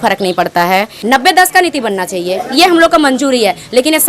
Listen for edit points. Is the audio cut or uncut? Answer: cut